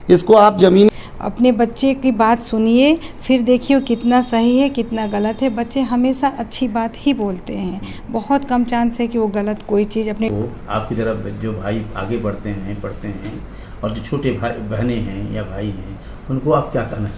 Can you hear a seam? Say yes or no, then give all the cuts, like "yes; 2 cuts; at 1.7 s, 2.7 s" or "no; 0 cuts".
yes; 2 cuts; at 0.9 s, 10.3 s